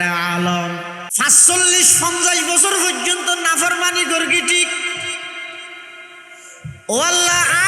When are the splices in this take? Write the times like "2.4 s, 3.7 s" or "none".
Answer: 1.0 s